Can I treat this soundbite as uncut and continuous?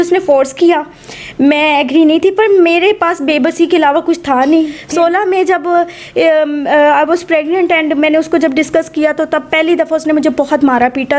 no; 1 cut; at 4.8 s

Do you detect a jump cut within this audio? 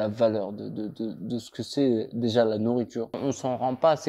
yes; 1 cut; at 3.2 s

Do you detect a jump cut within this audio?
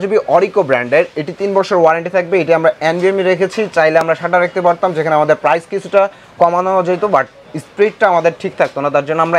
no; 0 cuts

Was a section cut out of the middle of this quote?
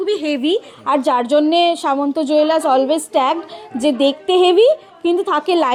no; 0 cuts

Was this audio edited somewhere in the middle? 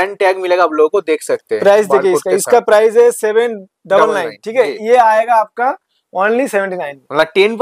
no; 0 cuts

